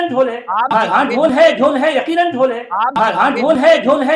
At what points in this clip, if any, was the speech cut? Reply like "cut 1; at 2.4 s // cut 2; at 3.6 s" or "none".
cut 1; at 0.7 s // cut 2; at 2.9 s